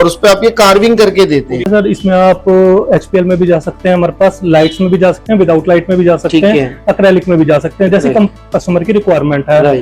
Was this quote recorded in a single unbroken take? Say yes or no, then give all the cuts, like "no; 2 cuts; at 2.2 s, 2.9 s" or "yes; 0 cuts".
no; 1 cut; at 1.7 s